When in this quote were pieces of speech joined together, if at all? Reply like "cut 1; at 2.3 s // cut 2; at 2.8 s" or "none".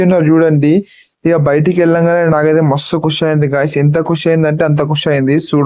none